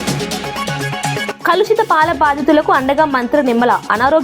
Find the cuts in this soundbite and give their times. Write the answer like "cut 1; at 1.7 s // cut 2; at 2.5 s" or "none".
cut 1; at 1.3 s